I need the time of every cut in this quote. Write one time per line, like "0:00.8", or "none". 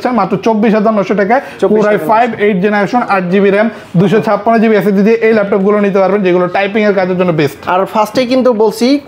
none